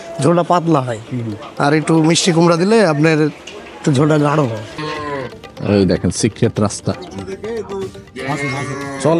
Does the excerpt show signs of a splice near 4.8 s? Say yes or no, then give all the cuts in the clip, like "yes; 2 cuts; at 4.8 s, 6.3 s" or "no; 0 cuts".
yes; 1 cut; at 4.8 s